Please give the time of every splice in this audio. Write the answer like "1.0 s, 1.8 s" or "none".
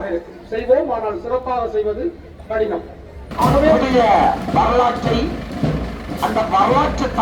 3.8 s